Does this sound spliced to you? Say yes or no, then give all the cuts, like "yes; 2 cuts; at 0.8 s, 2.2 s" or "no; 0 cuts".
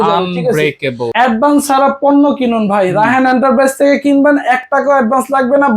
yes; 1 cut; at 1.0 s